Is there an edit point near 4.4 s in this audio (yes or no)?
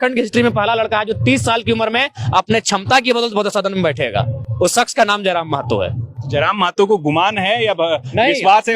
no